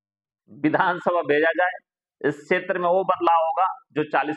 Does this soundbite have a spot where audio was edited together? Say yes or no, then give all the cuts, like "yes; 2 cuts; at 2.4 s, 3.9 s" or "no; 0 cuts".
no; 0 cuts